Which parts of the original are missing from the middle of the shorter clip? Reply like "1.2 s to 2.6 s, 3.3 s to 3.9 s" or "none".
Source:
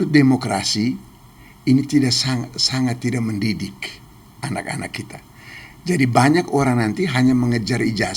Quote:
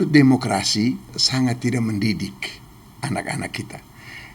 1.2 s to 2.6 s